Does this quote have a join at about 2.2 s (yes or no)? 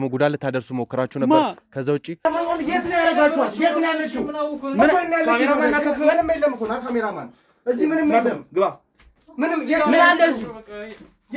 yes